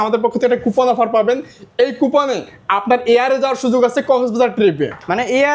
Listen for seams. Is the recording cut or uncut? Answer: uncut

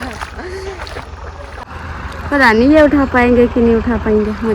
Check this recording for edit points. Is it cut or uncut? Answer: cut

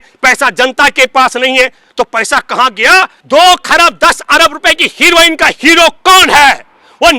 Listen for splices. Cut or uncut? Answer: cut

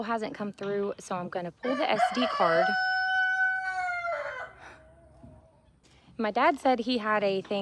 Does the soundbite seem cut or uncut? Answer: uncut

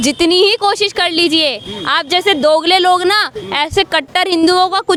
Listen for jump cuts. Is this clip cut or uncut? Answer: uncut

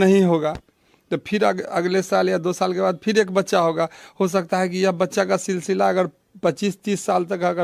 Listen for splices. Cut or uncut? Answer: uncut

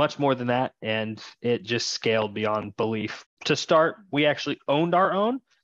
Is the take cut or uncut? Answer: cut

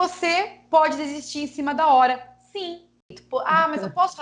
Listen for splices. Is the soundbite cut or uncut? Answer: cut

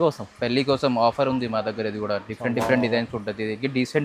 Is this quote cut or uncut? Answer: uncut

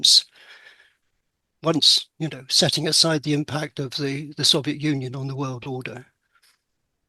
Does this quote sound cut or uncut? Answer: uncut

